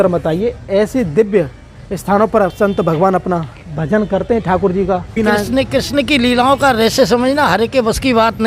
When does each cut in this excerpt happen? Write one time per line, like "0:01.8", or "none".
0:05.1

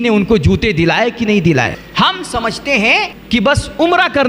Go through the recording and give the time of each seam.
0:01.8
0:03.2

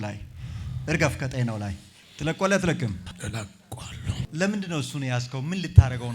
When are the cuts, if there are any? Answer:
0:03.1
0:04.3

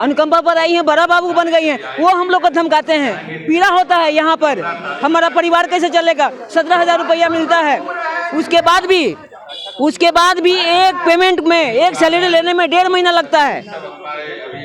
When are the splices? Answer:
none

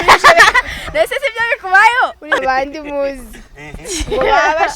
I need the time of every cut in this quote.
0:02.4

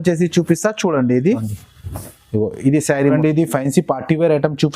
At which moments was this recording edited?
0:03.2

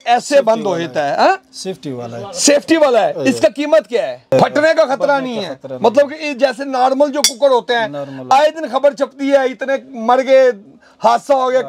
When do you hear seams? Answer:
0:04.3

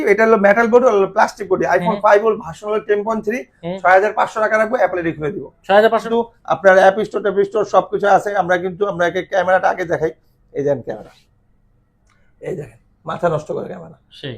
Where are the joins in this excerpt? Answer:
0:06.0

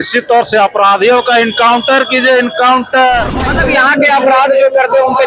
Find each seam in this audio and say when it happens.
0:03.5

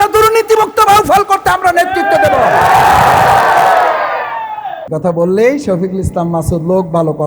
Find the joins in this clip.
0:04.8

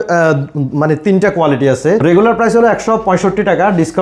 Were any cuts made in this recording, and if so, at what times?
0:02.0

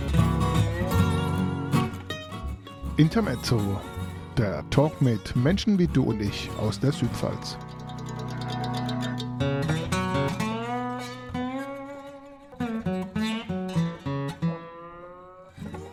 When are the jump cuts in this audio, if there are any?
none

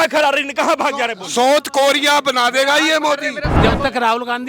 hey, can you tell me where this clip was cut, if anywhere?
0:03.4

